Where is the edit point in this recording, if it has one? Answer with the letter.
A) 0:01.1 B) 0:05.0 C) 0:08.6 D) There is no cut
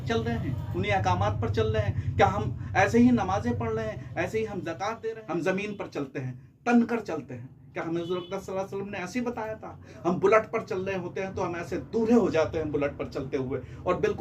B